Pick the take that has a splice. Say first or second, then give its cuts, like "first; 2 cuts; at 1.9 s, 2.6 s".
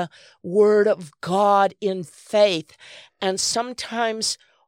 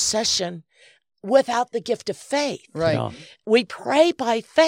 second; 1 cut; at 3.4 s